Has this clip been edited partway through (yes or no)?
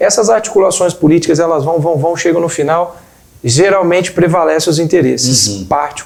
no